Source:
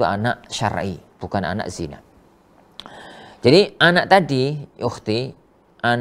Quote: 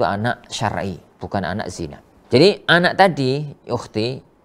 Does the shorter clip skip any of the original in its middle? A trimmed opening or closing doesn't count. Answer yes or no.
yes